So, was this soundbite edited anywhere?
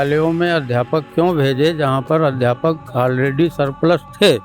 no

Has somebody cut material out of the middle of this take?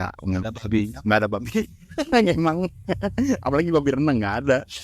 no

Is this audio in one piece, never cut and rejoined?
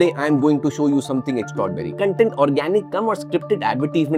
yes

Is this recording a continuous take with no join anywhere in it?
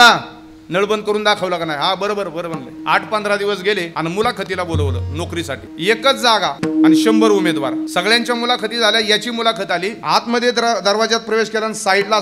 no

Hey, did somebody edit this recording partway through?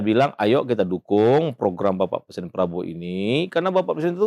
no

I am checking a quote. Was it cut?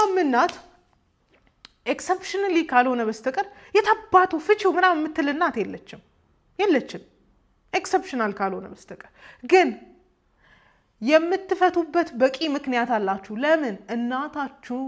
no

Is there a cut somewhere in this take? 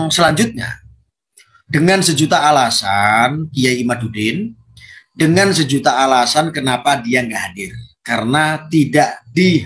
no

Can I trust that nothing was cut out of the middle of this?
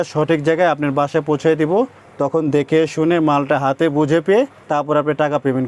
yes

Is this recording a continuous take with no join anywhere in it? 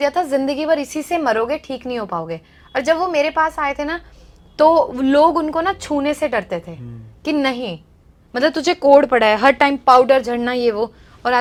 yes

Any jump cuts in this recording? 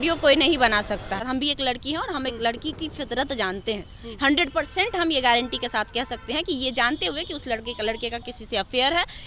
yes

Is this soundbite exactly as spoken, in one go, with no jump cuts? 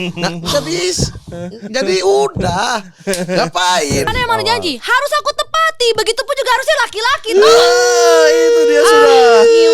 no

